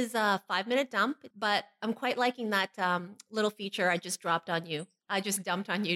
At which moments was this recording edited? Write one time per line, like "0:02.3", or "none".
0:01.3
0:02.4
0:04.9